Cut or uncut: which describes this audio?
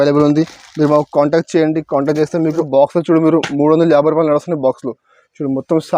cut